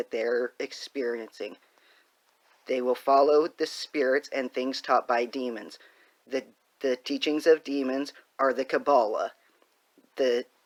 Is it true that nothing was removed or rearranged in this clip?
yes; 0 cuts

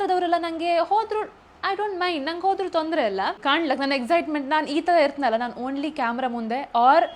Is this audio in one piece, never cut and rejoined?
no; 1 cut; at 3.4 s

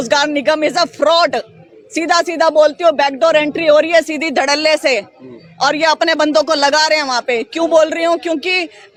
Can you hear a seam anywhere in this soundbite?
no; 0 cuts

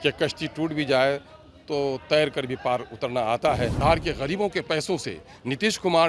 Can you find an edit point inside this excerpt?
yes; 1 cut; at 3.8 s

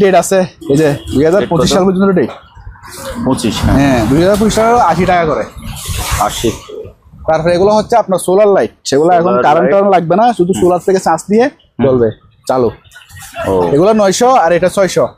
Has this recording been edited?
no; 0 cuts

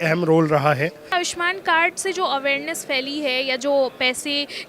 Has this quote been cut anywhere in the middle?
yes; 1 cut; at 1.0 s

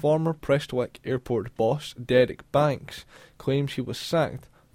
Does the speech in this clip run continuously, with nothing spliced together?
yes; 0 cuts

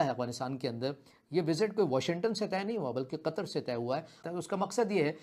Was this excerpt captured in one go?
no; 1 cut; at 4.2 s

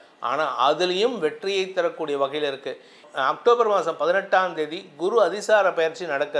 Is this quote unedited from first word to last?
yes; 0 cuts

